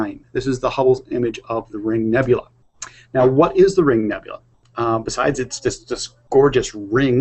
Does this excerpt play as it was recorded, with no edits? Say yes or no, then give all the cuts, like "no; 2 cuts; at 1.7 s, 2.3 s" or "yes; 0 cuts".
yes; 0 cuts